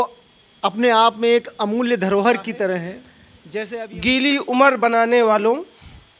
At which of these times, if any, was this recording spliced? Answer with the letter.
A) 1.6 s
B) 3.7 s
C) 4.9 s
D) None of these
B